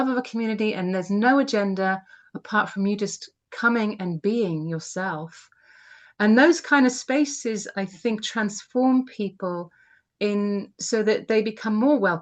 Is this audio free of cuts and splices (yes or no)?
yes